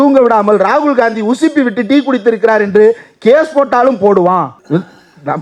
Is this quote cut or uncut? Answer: uncut